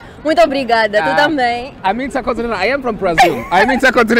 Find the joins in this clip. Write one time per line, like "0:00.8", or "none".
none